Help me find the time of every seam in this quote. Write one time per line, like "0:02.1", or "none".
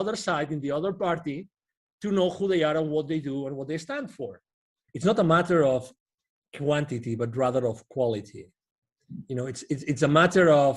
0:04.8

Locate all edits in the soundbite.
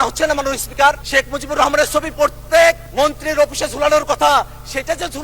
0:01.0
0:02.8

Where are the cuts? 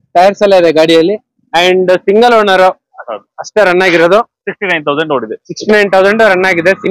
none

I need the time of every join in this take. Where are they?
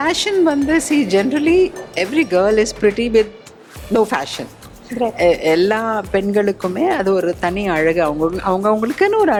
none

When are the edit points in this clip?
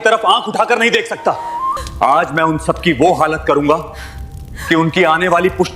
0:01.9

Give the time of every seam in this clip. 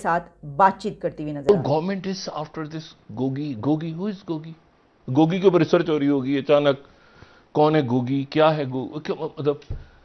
0:01.5

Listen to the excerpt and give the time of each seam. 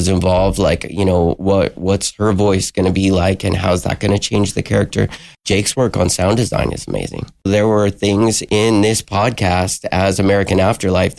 0:05.3
0:07.5

